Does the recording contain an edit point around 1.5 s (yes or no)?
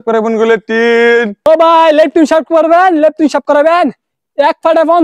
yes